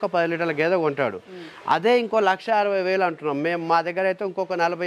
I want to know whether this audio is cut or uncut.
uncut